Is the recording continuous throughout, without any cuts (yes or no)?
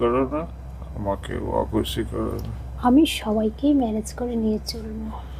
yes